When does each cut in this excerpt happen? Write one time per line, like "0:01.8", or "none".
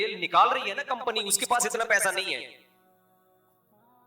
0:02.6

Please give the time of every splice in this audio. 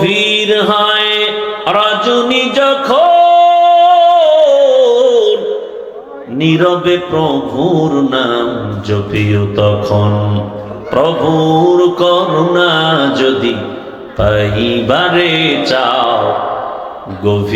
none

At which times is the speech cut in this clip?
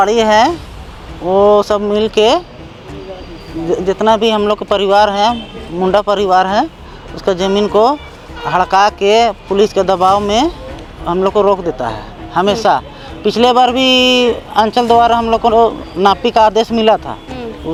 none

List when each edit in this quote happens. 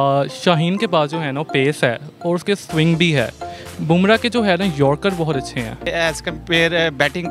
0:05.9

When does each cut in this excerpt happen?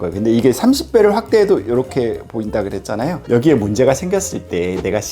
0:03.2

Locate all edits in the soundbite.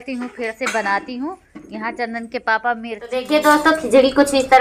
0:03.3

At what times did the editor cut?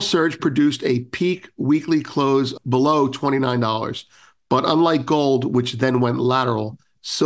0:02.6

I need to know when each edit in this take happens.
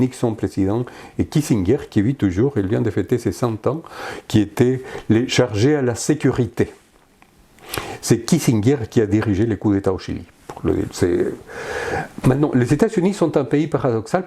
none

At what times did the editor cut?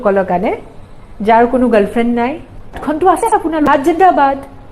0:03.7

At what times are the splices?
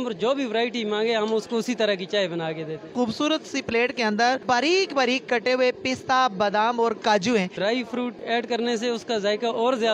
0:02.9
0:04.4
0:07.6

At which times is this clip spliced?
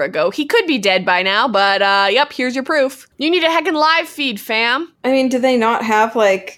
0:03.1
0:04.9

